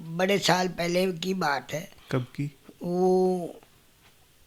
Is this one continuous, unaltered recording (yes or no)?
yes